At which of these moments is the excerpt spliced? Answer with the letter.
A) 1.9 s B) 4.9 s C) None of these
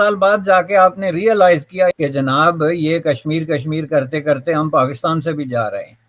A